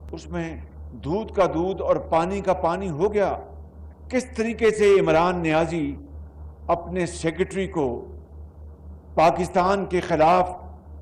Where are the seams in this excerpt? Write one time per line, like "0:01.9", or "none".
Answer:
none

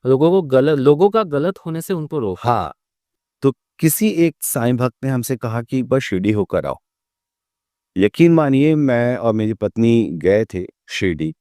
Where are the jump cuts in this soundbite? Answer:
0:03.0

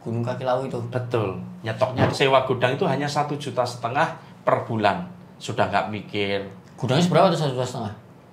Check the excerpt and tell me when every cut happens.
0:02.1

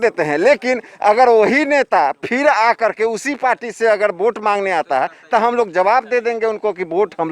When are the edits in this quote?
none

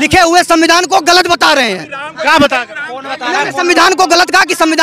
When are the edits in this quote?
none

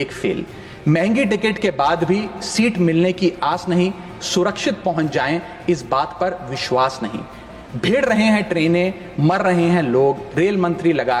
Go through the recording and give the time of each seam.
none

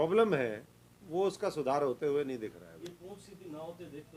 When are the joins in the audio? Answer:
none

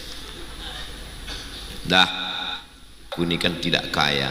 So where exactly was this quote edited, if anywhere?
0:03.1

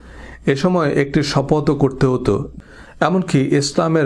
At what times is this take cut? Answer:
0:02.5

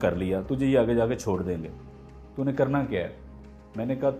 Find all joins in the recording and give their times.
none

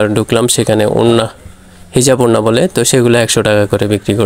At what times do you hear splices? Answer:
none

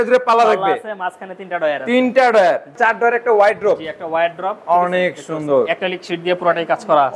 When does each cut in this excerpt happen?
0:02.7

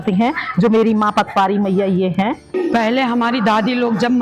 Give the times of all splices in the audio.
0:02.4

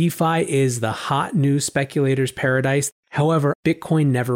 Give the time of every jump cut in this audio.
0:03.2

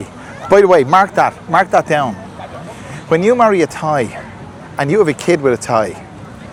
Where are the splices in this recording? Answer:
none

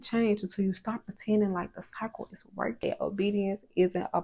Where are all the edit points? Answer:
0:02.8

